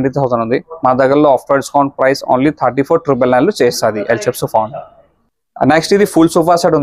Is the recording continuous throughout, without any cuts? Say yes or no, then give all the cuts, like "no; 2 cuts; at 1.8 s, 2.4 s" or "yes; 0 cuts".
yes; 0 cuts